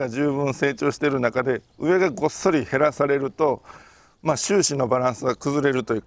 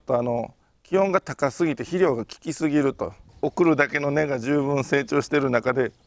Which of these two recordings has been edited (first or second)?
second